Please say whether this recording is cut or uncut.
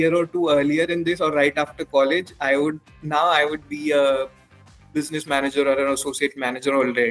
uncut